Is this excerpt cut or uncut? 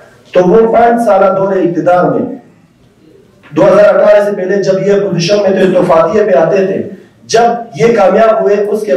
uncut